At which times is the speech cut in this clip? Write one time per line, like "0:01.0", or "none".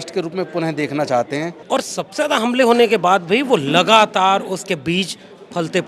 0:01.6